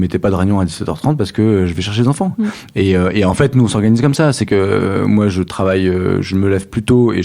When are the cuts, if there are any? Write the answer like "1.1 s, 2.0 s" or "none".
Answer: none

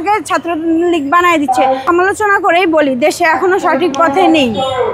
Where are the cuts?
1.8 s

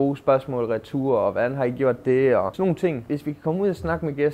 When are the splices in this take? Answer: 2.9 s

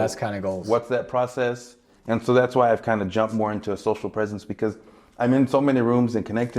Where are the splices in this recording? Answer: 1.9 s

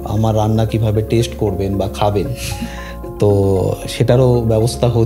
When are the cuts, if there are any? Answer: none

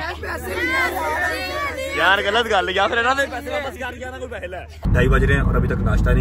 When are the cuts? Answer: 4.8 s

